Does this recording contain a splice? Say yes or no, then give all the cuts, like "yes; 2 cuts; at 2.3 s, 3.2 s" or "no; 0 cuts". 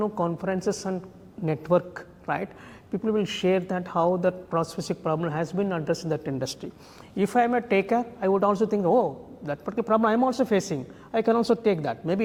no; 0 cuts